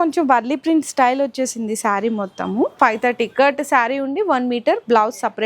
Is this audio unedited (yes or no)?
no